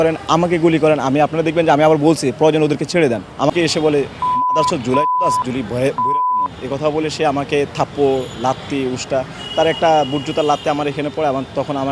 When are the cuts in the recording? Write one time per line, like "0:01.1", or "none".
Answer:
0:03.5